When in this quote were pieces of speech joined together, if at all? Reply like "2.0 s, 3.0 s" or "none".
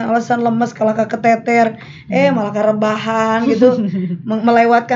none